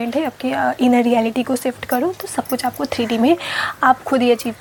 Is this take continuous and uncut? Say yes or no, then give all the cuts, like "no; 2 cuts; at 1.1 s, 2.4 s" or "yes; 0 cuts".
yes; 0 cuts